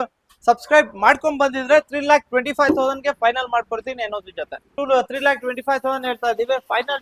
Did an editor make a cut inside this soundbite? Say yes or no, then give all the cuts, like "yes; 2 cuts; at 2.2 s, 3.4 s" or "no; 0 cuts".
yes; 1 cut; at 4.7 s